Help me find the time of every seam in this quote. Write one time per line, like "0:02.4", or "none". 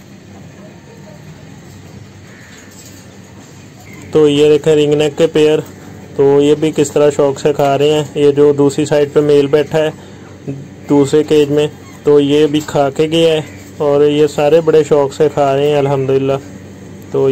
0:03.9